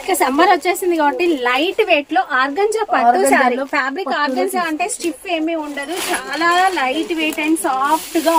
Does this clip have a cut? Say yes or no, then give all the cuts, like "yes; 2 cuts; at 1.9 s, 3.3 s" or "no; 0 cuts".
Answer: no; 0 cuts